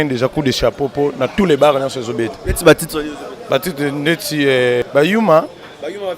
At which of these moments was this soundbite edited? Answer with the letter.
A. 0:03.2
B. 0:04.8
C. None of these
B